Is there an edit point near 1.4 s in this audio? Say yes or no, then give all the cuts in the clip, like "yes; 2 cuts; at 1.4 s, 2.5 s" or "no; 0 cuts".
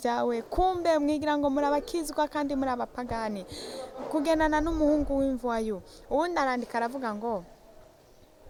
no; 0 cuts